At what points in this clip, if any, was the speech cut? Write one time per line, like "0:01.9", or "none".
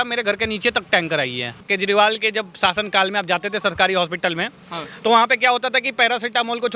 0:01.6

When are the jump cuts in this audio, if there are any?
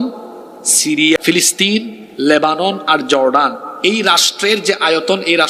0:01.2

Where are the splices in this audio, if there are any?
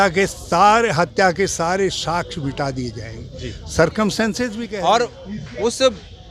0:04.6

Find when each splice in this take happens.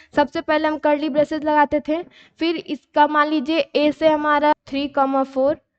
0:04.5

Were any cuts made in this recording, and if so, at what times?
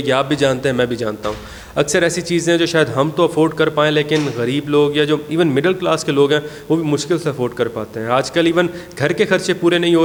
none

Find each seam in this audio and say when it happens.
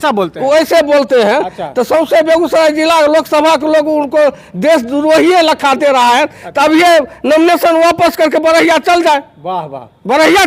none

